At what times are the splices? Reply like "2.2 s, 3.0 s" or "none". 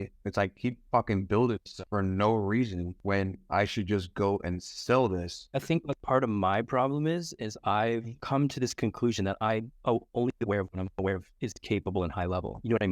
5.4 s